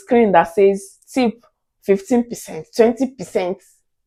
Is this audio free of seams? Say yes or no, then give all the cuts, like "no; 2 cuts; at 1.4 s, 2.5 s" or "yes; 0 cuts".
yes; 0 cuts